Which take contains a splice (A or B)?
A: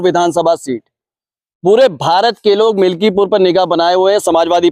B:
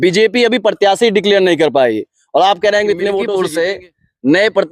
B